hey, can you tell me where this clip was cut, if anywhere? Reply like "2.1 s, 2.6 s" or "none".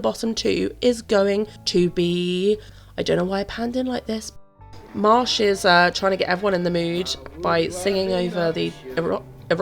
1.6 s, 2.8 s, 4.3 s